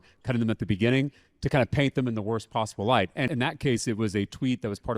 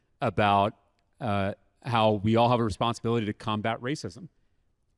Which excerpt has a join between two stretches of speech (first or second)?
first